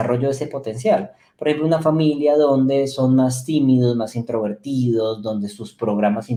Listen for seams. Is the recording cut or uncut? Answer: uncut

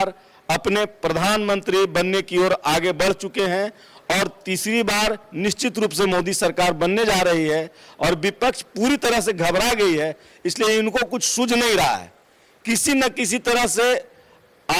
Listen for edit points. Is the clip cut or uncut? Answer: uncut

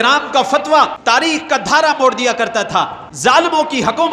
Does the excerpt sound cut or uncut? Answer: cut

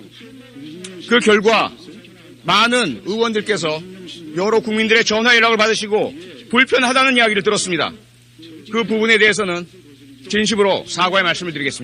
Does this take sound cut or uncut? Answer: uncut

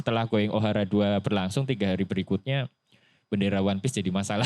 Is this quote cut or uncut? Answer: uncut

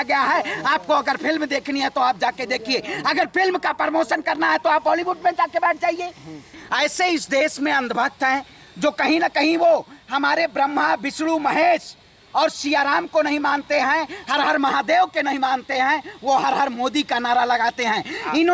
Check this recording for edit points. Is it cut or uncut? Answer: cut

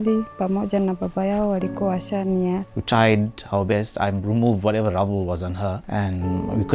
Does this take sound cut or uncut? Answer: cut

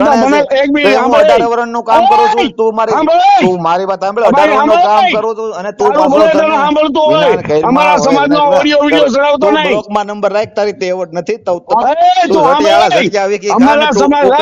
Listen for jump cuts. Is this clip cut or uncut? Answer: uncut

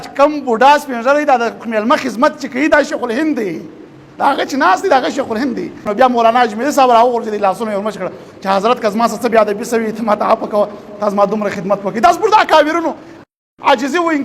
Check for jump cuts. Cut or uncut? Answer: cut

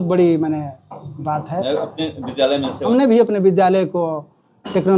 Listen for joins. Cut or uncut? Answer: cut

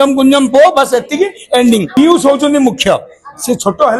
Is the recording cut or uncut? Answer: cut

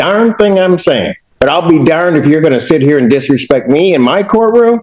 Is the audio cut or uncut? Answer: cut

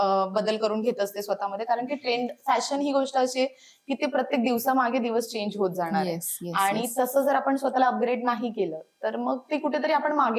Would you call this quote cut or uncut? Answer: uncut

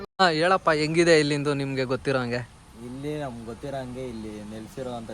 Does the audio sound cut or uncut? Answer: uncut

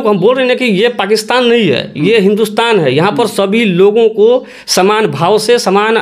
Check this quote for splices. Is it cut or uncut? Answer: uncut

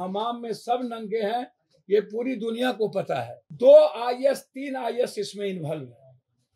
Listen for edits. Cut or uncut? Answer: cut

